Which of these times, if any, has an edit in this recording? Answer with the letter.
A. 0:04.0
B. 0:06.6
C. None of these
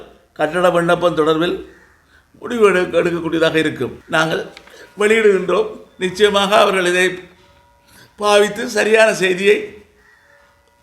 A